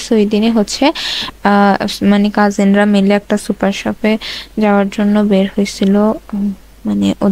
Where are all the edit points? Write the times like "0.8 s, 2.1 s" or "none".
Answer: none